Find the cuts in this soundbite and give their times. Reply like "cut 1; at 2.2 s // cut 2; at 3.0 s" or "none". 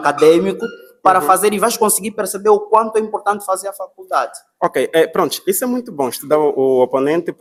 none